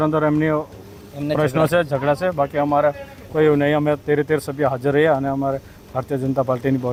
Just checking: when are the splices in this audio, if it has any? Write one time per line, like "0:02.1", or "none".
none